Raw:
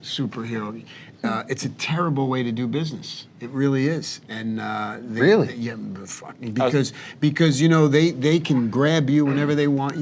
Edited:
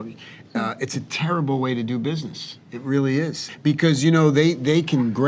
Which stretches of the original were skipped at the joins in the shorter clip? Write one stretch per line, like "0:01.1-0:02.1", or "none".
0:04.1-0:07.0